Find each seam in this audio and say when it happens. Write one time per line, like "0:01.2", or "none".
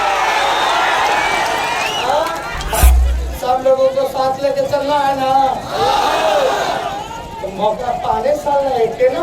0:02.8

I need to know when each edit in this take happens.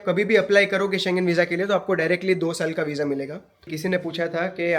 0:03.6

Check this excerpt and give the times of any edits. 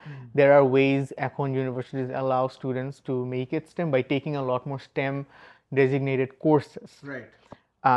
none

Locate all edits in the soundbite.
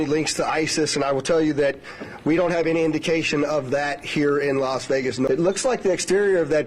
0:05.2

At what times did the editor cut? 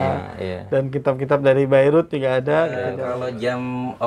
0:03.0

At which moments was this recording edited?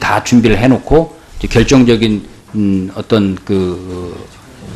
0:01.7

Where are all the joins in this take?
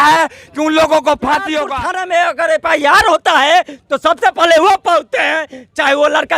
0:01.7

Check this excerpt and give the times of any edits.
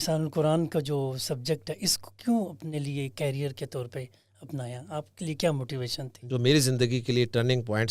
0:06.2

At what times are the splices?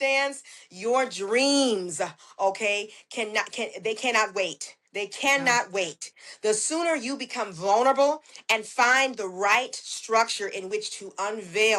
none

